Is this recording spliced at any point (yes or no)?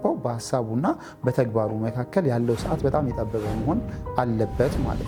no